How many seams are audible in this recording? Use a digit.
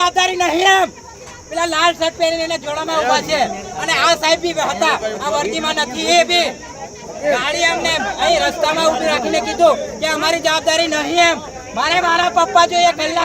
0